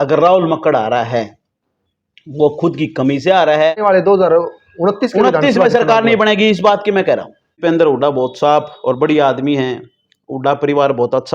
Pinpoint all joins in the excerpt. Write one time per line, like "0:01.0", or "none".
0:03.8
0:07.5